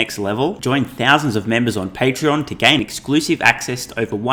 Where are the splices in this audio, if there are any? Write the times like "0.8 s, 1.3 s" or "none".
none